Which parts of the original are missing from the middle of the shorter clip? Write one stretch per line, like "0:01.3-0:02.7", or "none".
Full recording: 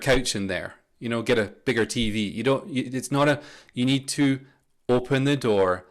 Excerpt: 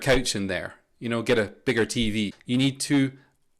0:02.3-0:03.6